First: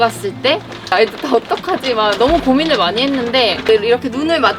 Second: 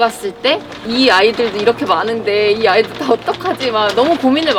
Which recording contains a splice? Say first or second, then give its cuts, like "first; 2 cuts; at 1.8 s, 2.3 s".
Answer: first; 2 cuts; at 0.9 s, 3.7 s